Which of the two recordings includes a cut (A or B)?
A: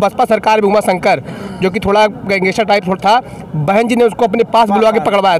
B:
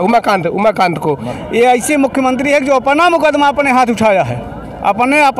B